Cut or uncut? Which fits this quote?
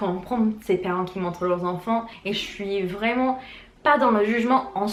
uncut